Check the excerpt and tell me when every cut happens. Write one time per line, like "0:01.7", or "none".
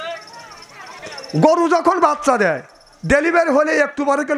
0:00.9